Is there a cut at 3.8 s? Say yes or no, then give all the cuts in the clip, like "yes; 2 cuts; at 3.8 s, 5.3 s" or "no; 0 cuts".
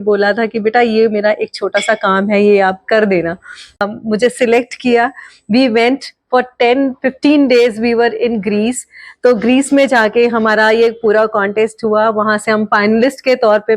yes; 1 cut; at 3.8 s